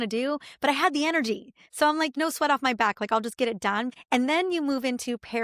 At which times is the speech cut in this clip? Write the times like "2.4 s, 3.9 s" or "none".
2.1 s, 3.9 s